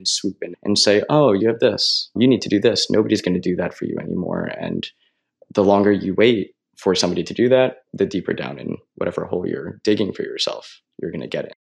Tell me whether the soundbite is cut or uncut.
uncut